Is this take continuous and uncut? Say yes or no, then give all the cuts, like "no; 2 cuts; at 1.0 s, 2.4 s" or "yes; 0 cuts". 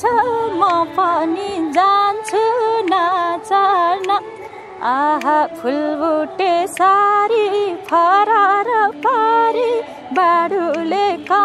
yes; 0 cuts